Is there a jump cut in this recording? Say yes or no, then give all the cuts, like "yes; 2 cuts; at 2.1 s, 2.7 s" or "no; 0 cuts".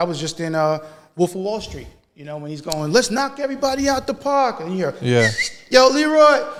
no; 0 cuts